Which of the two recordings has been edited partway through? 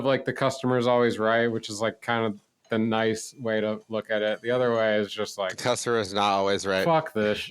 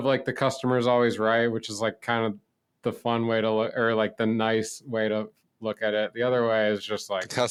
first; 2 cuts; at 2.7 s, 3.8 s

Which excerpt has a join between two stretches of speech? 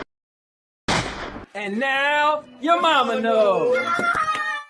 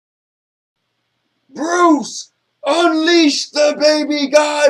first; 1 cut; at 1.0 s

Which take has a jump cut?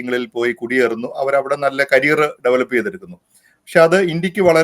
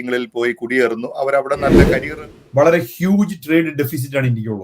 second; 1 cut; at 1.9 s

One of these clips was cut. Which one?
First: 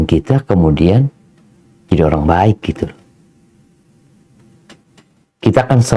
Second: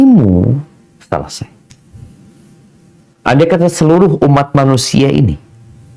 second; 1 cut; at 3.0 s

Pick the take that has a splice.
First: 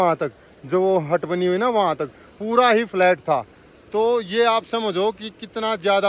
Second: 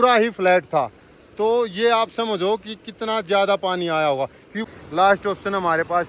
second; 1 cut; at 4.6 s

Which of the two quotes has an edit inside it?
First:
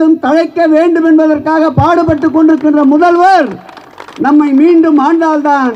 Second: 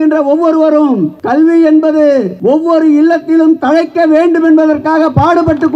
second; 2 cuts; at 1.2 s, 2.3 s

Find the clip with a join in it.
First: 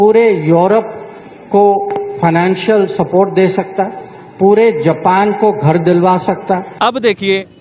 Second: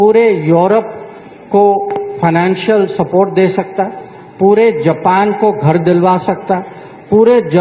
first; 1 cut; at 6.7 s

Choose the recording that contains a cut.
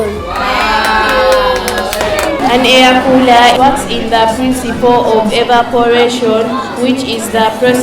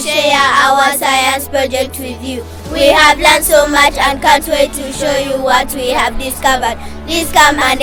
first; 2 cuts; at 2.4 s, 3.6 s

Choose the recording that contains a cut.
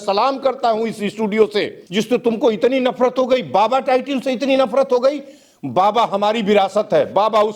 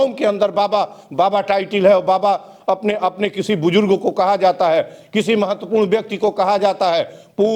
first; 1 cut; at 1.8 s

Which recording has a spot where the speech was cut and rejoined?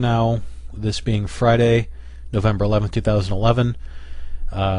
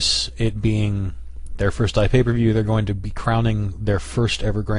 second; 1 cut; at 2.0 s

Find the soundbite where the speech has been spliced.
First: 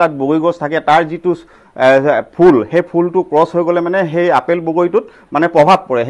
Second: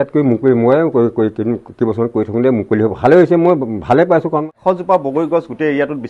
second; 1 cut; at 4.4 s

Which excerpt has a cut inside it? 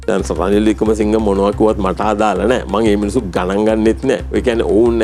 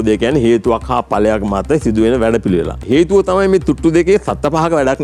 second; 1 cut; at 2.8 s

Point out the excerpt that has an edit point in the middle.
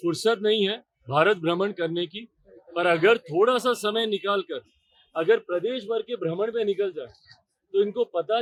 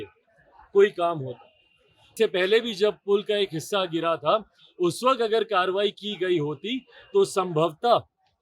second; 1 cut; at 2.1 s

